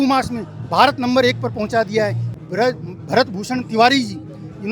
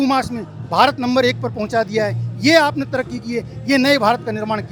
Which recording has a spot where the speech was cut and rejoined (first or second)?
first